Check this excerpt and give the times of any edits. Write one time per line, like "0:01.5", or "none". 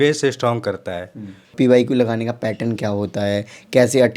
0:01.5